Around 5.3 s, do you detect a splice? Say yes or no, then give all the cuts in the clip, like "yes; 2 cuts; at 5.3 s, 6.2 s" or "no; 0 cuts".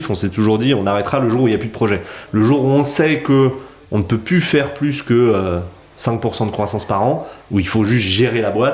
no; 0 cuts